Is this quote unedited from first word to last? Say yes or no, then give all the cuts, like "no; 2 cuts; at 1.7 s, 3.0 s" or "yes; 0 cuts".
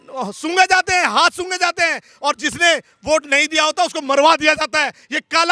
yes; 0 cuts